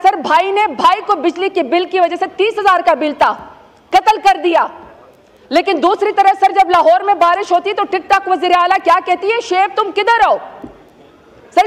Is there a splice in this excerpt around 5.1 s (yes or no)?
no